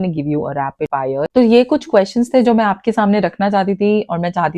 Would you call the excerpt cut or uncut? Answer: cut